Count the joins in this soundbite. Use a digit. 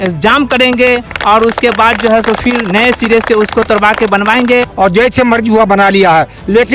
1